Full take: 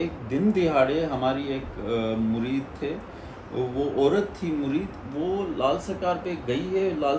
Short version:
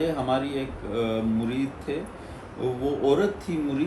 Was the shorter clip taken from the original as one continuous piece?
yes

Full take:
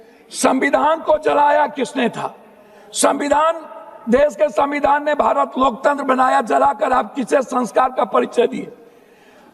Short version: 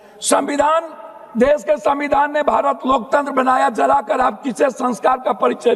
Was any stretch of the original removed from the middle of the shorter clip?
no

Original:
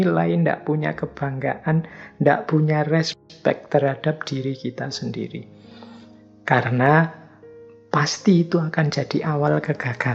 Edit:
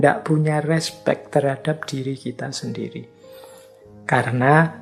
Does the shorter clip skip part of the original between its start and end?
yes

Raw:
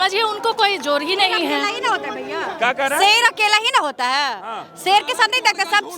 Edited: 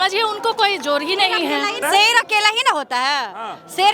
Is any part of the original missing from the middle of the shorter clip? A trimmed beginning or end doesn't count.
yes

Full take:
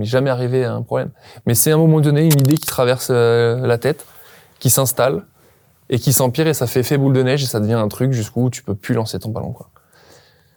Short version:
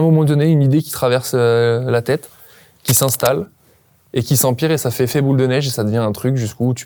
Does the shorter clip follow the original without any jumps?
yes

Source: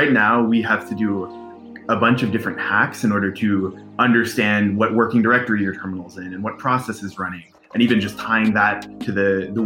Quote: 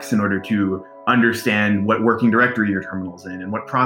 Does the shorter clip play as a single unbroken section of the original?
yes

